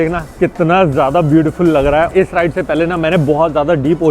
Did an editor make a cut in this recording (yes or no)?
yes